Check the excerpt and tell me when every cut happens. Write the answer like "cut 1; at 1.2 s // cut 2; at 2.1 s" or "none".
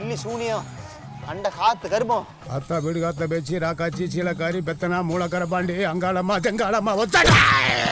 none